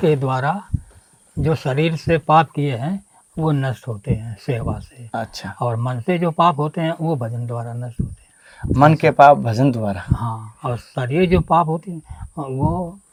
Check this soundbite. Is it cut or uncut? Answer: uncut